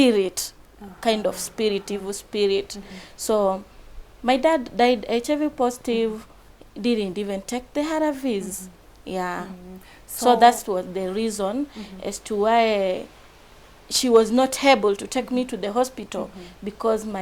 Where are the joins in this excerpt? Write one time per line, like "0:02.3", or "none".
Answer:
none

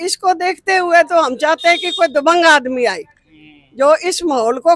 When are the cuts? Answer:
none

